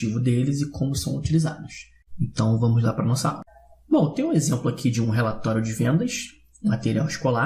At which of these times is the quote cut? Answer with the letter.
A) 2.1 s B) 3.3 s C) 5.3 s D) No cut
D